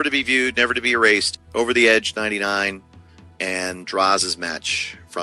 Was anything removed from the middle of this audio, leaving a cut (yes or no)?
no